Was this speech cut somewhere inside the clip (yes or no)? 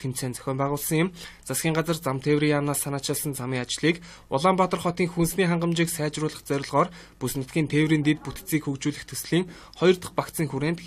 yes